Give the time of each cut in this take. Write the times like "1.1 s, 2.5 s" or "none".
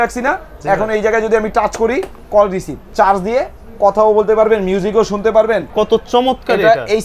2.8 s, 5.7 s

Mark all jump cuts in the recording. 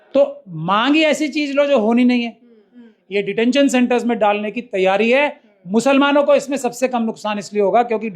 2.7 s

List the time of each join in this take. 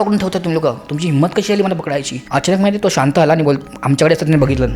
2.1 s

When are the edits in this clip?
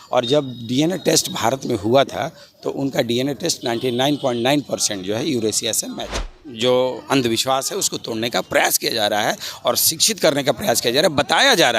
6.2 s

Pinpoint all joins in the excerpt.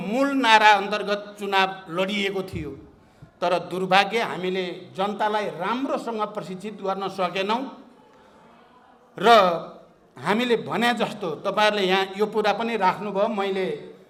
none

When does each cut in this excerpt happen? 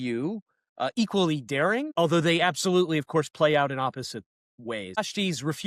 1.9 s, 5.0 s

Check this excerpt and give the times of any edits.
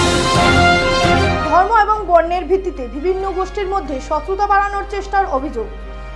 none

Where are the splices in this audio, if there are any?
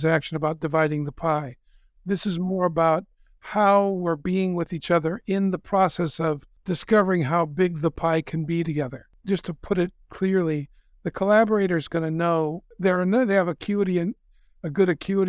6.5 s, 8.9 s, 12.7 s

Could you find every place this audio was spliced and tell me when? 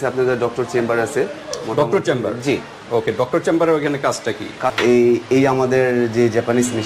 4.8 s

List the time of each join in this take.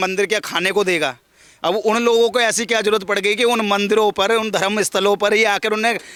none

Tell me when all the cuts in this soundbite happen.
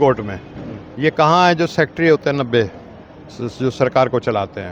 none

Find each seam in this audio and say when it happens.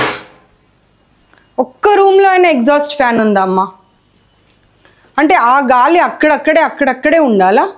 none

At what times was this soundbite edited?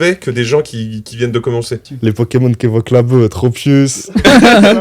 1.9 s

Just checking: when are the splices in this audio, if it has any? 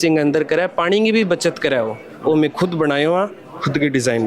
none

